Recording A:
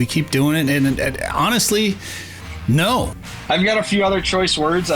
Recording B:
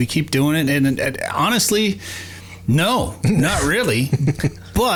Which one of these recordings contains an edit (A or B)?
A